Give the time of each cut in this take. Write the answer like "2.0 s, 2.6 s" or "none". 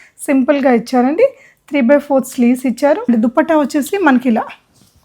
3.1 s